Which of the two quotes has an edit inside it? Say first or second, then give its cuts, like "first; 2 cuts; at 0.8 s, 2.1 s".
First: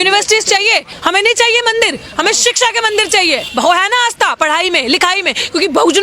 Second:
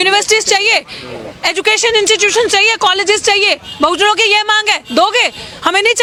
first; 2 cuts; at 0.9 s, 3.5 s